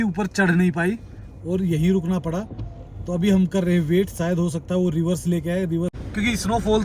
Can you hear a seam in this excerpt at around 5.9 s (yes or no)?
yes